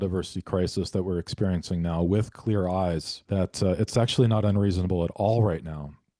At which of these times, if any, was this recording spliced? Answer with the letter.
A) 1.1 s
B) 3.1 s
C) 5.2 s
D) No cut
B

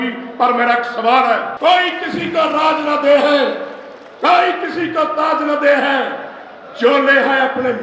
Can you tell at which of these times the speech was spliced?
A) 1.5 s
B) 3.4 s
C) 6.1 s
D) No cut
A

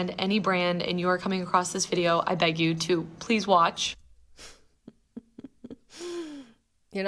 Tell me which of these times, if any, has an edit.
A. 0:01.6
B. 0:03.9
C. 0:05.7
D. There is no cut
B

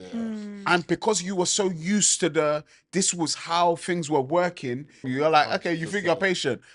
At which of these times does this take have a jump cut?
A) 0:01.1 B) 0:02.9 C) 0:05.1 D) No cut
C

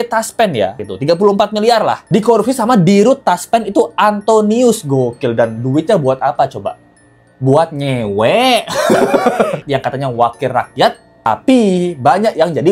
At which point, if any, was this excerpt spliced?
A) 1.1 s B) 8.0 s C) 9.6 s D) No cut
C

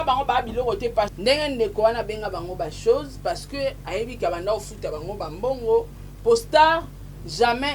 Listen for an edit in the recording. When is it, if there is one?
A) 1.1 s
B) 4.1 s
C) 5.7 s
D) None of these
A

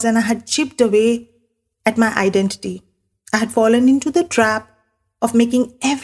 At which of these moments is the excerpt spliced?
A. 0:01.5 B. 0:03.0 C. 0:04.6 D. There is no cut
D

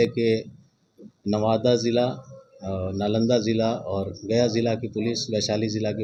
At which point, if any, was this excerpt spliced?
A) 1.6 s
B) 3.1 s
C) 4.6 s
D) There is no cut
D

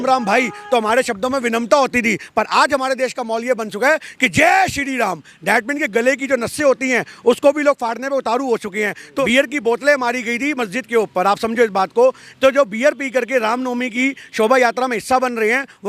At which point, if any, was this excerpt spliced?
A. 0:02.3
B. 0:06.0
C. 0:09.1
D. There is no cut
C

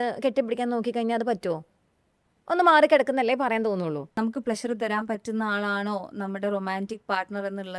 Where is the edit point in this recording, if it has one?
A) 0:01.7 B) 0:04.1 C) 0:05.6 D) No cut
B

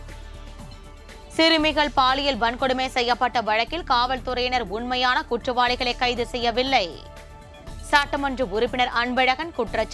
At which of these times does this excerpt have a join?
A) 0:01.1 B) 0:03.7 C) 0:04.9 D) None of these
A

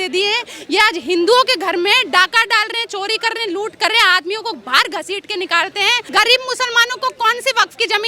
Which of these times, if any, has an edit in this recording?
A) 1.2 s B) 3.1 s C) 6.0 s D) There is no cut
C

